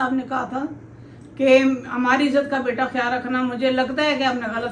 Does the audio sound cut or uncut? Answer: uncut